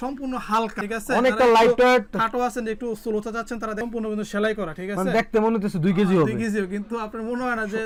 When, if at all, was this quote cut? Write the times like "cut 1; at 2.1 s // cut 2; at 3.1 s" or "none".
none